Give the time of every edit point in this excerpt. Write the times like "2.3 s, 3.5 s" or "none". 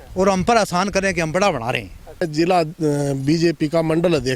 2.3 s